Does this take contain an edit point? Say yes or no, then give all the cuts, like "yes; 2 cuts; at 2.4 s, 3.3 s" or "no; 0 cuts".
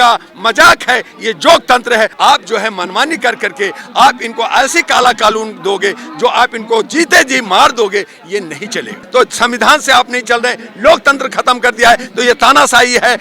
yes; 2 cuts; at 2.1 s, 9.0 s